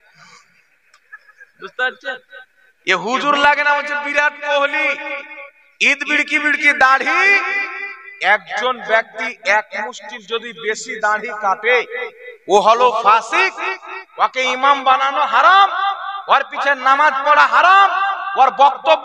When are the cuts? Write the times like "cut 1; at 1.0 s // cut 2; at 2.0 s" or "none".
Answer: none